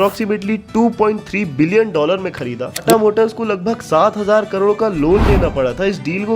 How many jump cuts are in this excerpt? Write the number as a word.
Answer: one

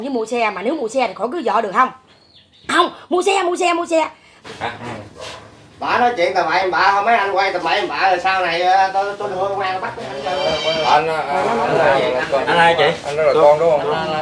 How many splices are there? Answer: one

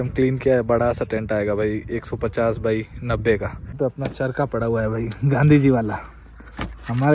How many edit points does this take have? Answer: one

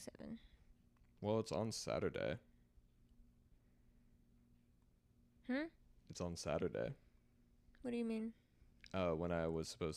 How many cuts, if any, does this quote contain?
zero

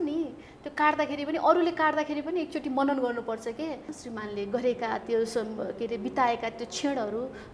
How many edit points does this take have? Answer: one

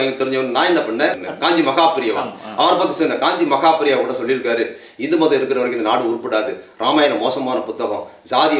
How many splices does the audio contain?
one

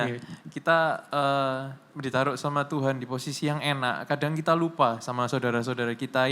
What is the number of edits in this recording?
zero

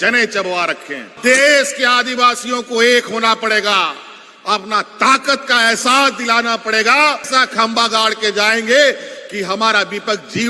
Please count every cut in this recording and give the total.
two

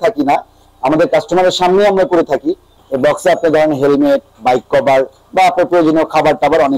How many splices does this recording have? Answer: one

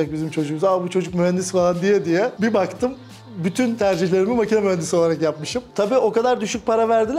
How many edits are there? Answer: one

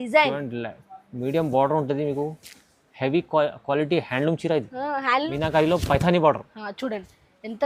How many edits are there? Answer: one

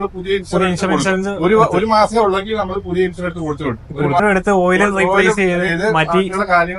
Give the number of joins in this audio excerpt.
one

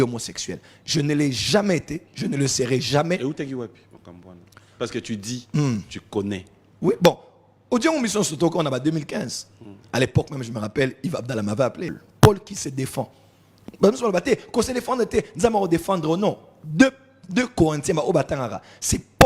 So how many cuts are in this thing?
one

